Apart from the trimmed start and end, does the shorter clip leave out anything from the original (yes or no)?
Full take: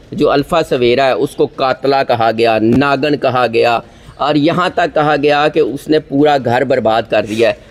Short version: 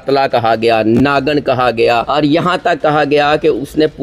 yes